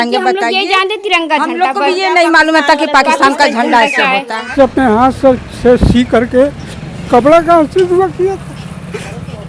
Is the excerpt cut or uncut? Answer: cut